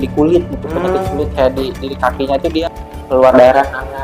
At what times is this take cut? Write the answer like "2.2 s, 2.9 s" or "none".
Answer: 2.6 s